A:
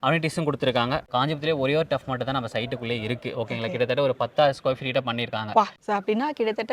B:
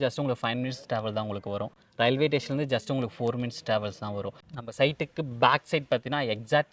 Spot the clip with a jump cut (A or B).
A